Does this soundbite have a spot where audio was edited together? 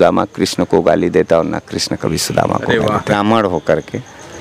yes; 1 cut; at 3.1 s

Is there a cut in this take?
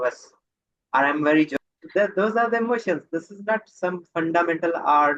yes; 1 cut; at 1.5 s

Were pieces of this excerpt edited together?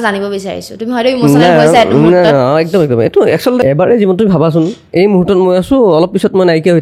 yes; 1 cut; at 3.6 s

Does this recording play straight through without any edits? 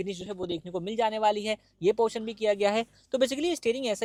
yes; 0 cuts

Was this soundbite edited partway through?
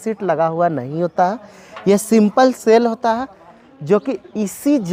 no; 0 cuts

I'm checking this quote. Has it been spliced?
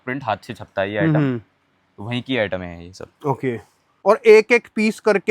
yes; 1 cut; at 3.8 s

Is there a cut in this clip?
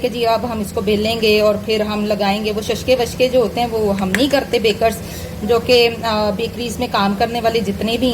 no; 0 cuts

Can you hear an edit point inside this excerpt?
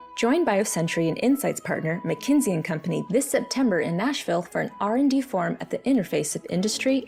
no; 0 cuts

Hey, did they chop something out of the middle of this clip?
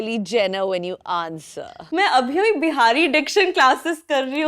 yes; 1 cut; at 1.8 s

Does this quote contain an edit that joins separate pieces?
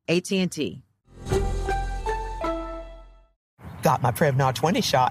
yes; 1 cut; at 3.4 s

